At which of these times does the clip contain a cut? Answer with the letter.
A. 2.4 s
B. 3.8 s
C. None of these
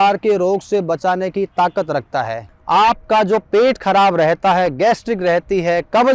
A